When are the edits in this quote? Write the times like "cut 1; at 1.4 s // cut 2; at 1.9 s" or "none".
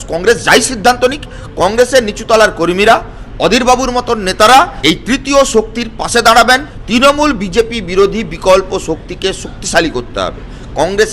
cut 1; at 4.8 s // cut 2; at 6.7 s